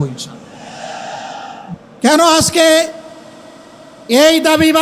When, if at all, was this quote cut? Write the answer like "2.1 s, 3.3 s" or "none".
1.7 s